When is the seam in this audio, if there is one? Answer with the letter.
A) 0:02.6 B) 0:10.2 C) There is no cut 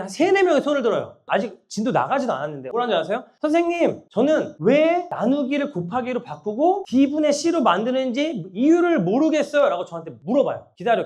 A